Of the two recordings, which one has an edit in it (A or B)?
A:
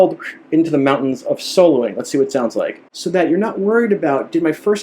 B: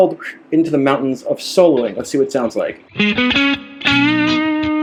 A